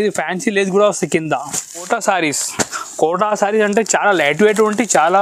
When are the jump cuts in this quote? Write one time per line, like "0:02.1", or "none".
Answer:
0:01.9